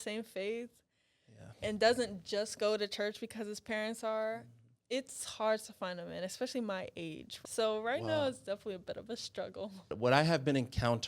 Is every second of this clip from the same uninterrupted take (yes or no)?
no